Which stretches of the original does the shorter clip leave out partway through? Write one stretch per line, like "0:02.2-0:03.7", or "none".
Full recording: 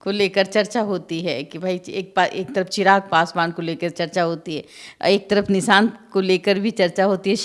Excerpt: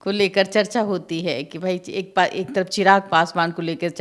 none